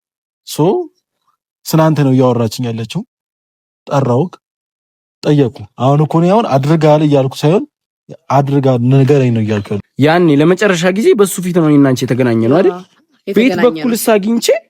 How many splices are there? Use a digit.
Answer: 1